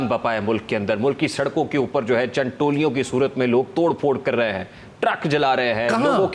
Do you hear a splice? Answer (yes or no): no